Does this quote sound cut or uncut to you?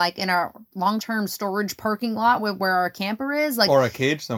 cut